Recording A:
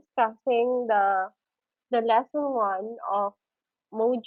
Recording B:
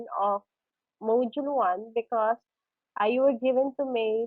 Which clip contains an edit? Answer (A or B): B